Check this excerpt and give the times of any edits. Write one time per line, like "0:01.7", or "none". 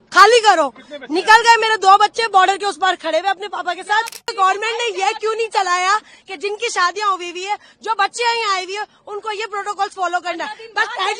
0:04.3